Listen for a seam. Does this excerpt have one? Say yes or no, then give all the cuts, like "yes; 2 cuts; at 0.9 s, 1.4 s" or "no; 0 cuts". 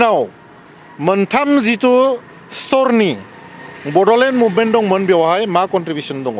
no; 0 cuts